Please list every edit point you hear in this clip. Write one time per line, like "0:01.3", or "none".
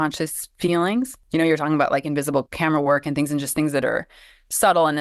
0:01.2